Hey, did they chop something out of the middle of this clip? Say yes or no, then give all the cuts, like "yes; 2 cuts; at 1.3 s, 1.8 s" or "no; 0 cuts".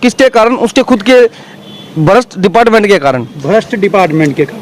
no; 0 cuts